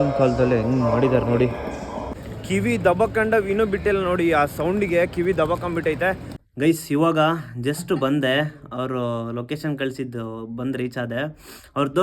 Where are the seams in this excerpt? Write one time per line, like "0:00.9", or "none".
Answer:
0:02.1
0:06.3